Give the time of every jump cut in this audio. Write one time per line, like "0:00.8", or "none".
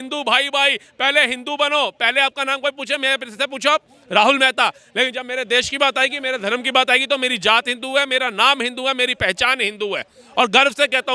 none